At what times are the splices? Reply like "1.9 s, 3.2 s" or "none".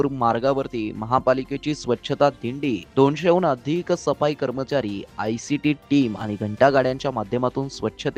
none